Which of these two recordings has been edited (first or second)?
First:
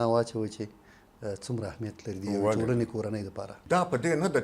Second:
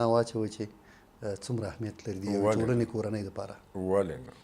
first